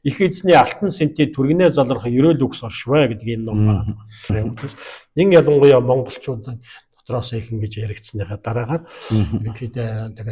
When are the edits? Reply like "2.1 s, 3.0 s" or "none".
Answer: 4.3 s